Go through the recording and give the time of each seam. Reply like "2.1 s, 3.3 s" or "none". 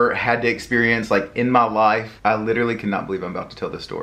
2.1 s